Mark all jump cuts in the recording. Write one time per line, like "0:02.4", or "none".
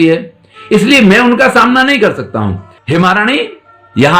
0:02.7